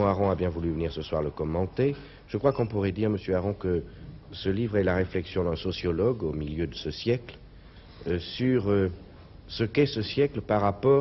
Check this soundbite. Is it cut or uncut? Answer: uncut